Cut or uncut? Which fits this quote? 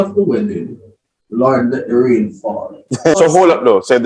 cut